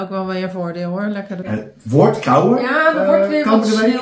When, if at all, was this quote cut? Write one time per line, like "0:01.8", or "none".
0:01.4